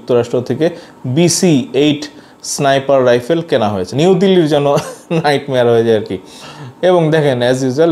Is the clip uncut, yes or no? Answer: no